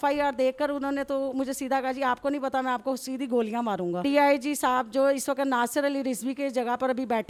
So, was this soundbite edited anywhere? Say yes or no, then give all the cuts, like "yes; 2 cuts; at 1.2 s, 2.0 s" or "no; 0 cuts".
no; 0 cuts